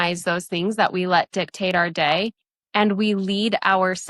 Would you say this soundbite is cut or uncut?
uncut